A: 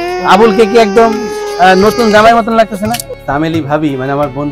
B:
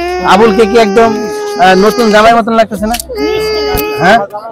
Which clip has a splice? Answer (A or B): A